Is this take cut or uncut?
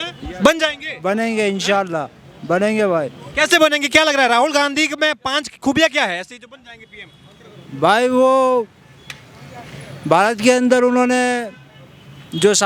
uncut